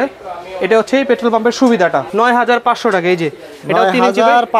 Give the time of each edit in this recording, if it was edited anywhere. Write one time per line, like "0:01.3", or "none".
0:02.1